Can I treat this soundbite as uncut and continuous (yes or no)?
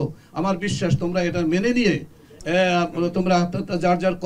yes